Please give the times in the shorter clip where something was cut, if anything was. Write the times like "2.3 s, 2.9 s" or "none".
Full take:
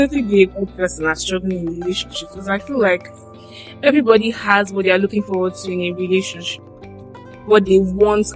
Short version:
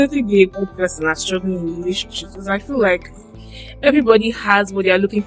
none